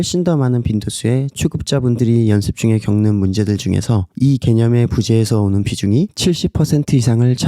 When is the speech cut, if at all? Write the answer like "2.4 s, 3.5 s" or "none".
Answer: 1.3 s